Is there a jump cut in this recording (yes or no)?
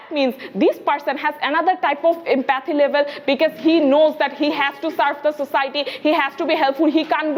no